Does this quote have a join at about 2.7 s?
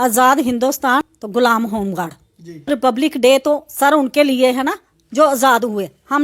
yes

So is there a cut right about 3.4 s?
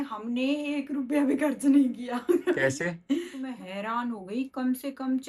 yes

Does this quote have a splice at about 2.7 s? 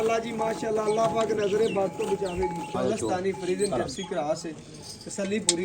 yes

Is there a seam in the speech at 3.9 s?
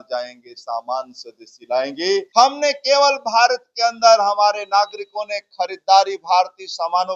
no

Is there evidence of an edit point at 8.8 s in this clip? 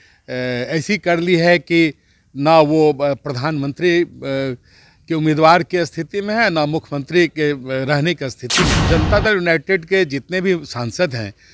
yes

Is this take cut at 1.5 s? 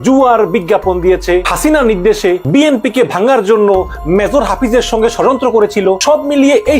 yes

